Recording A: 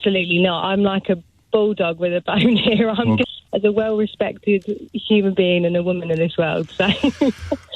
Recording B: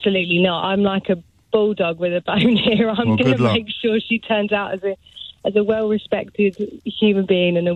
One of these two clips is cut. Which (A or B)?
A